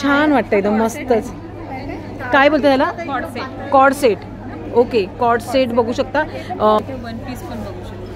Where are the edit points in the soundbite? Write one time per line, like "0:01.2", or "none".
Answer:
0:06.8